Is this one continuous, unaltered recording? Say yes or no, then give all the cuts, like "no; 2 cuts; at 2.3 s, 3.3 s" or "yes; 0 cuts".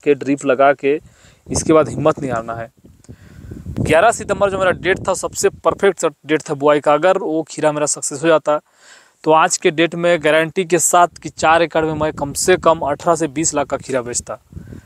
no; 1 cut; at 3.7 s